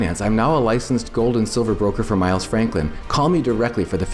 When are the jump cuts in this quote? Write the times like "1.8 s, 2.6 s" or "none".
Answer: none